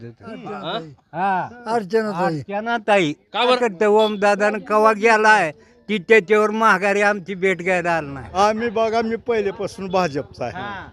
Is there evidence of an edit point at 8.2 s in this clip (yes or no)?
yes